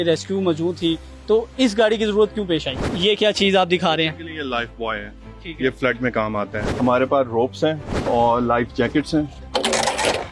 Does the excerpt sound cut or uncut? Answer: cut